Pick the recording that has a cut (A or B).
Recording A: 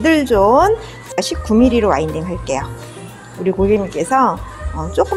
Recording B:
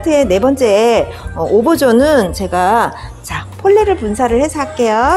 A